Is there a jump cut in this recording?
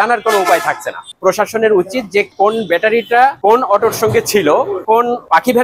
no; 0 cuts

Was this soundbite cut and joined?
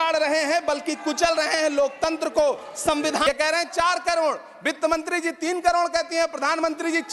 yes; 1 cut; at 3.2 s

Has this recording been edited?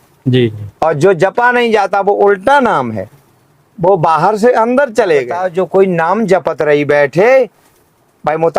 yes; 1 cut; at 5.4 s

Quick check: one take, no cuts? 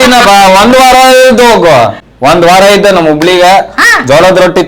no; 1 cut; at 2.0 s

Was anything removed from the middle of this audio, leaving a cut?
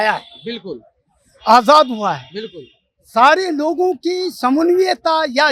no; 0 cuts

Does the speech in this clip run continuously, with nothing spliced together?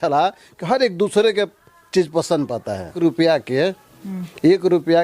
no; 1 cut; at 2.9 s

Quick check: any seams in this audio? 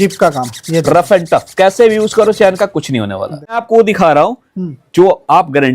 yes; 1 cut; at 3.6 s

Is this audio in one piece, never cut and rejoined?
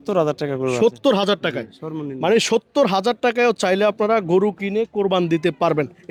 yes; 0 cuts

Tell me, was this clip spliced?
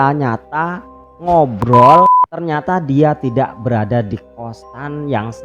yes; 1 cut; at 2.2 s

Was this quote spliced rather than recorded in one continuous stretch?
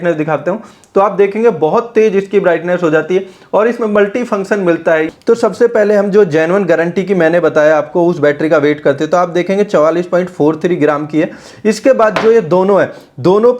yes; 1 cut; at 5.1 s

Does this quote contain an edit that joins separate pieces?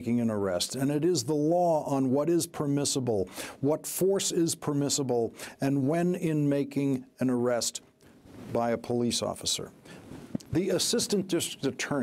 yes; 1 cut; at 5.1 s

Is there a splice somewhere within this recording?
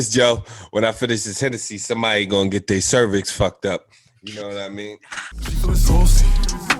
yes; 1 cut; at 5.3 s

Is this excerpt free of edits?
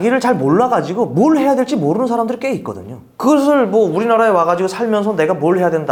yes; 0 cuts

